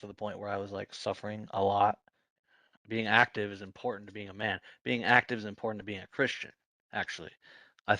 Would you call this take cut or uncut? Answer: cut